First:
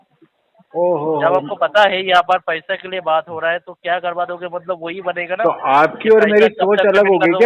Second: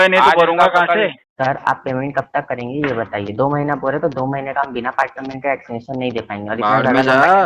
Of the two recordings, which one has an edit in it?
second; 1 cut; at 1.2 s

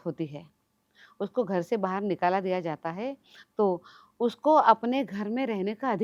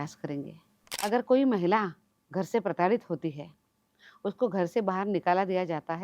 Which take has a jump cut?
second; 1 cut; at 0.9 s

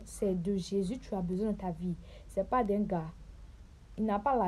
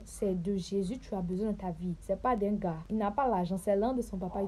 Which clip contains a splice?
second; 2 cuts; at 2.0 s, 2.8 s

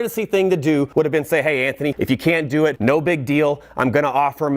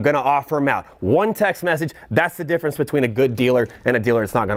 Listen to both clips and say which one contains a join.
first; 3 cuts; at 0.9 s, 2.0 s, 2.8 s

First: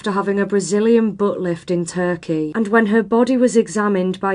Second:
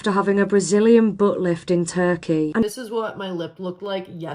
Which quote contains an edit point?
second; 1 cut; at 2.7 s

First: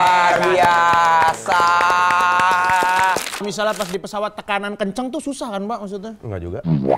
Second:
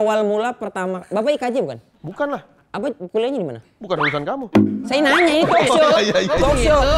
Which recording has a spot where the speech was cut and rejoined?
first; 1 cut; at 3.5 s

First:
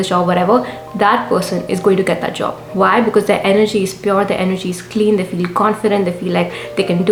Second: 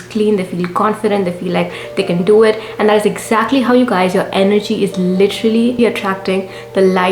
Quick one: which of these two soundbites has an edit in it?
second; 1 cut; at 6.0 s

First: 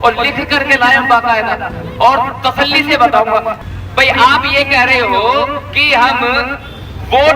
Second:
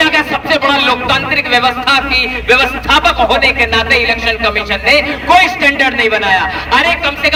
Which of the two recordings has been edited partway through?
first; 1 cut; at 3.6 s

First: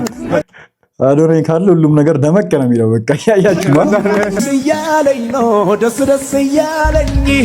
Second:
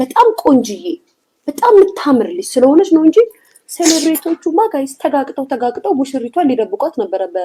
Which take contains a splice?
first; 1 cut; at 4.4 s

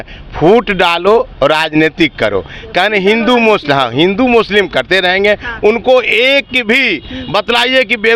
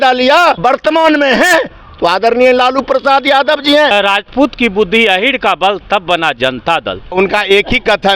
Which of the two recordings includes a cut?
second; 2 cuts; at 3.9 s, 7.1 s

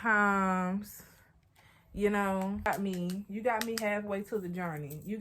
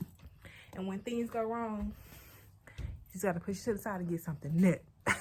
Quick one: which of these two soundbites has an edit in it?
first; 1 cut; at 2.7 s

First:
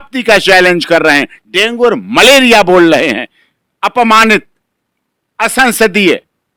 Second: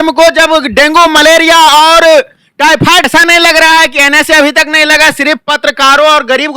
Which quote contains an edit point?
second; 1 cut; at 3.1 s

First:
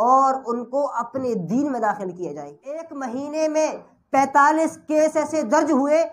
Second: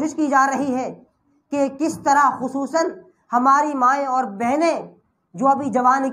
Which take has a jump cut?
first; 1 cut; at 2.9 s

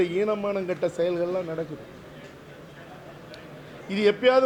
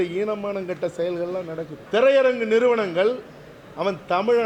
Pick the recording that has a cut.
second; 1 cut; at 1.8 s

